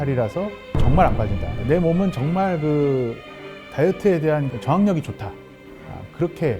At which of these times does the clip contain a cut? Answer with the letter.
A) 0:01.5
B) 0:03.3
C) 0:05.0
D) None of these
A